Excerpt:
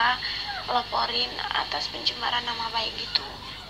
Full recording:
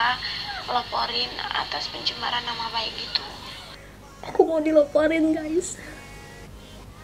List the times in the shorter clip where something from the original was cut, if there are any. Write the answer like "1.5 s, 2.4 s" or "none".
none